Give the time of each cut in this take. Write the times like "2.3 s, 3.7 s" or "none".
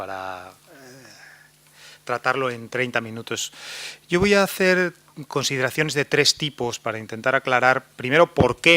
2.2 s